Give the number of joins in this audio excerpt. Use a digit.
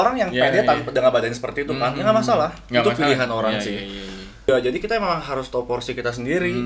1